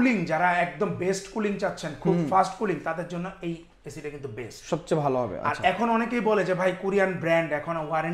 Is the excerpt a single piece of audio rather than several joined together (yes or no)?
yes